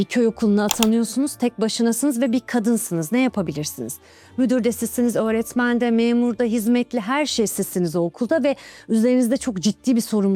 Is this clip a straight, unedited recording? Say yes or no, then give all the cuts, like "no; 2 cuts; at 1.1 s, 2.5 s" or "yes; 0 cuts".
yes; 0 cuts